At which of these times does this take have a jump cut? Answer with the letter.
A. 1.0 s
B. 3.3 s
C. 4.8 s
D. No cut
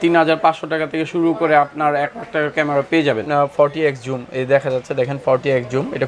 B